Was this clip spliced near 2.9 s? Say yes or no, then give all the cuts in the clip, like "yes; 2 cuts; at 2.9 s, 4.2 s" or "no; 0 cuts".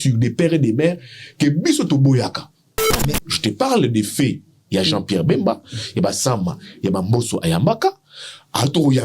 yes; 1 cut; at 2.9 s